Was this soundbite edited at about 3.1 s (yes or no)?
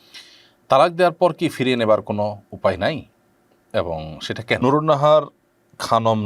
no